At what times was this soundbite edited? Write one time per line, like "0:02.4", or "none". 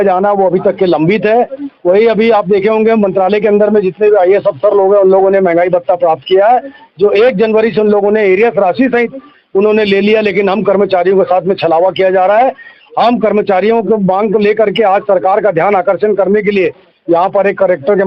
none